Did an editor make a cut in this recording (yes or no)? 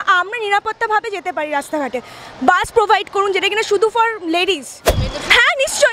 yes